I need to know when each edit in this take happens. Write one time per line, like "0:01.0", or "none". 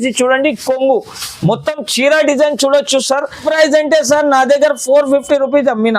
0:03.4

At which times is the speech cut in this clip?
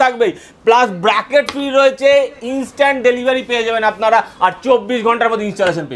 none

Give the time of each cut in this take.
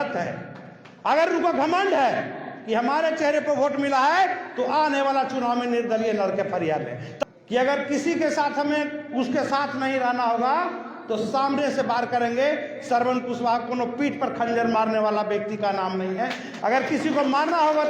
0:07.1

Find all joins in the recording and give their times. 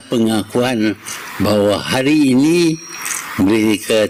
none

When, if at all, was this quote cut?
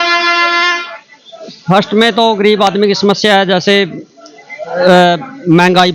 none

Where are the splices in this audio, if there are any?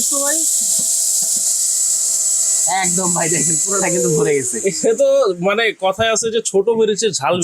none

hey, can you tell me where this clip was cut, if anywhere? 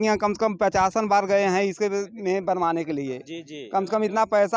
none

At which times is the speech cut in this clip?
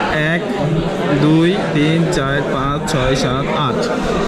none

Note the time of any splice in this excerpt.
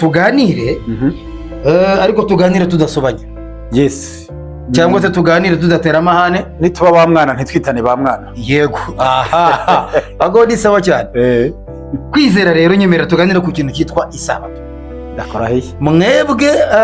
none

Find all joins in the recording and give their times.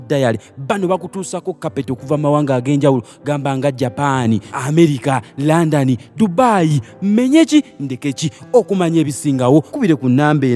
none

